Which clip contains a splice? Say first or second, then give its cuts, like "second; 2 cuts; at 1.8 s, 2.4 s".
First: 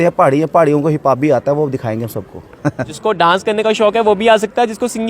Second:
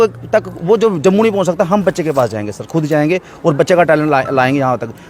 first; 1 cut; at 2.9 s